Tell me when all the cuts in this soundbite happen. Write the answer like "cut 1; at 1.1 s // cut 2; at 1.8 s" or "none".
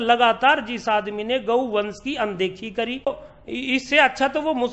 cut 1; at 3.0 s